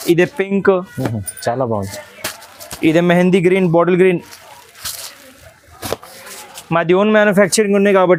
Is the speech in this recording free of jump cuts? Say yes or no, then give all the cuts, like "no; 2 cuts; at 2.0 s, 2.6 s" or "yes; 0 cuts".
yes; 0 cuts